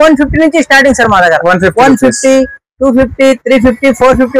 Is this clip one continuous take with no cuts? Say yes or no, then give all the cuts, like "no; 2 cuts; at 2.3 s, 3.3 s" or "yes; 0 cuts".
yes; 0 cuts